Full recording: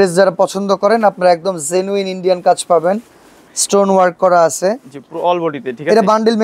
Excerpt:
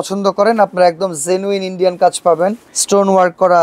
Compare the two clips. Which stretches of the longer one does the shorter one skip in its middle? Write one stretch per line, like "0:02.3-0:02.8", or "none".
0:03.1-0:03.5

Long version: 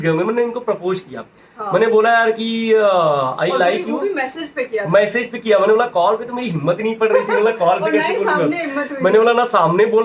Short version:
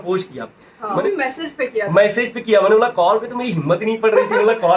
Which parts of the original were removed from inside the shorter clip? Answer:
0:01.8-0:04.0

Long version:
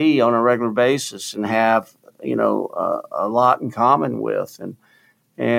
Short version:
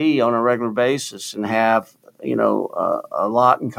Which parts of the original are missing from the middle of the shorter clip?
none

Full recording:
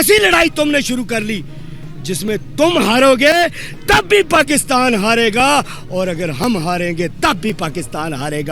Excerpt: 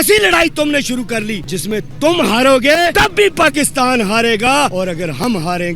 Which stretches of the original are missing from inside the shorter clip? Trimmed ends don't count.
0:01.5-0:02.0
0:03.5-0:03.9
0:05.7-0:05.9

